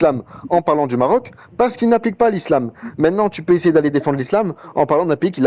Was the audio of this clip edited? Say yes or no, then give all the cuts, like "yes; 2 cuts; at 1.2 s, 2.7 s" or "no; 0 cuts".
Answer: no; 0 cuts